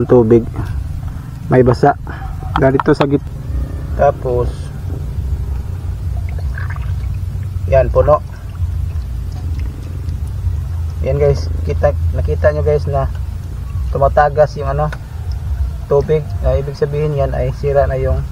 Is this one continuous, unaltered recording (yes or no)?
no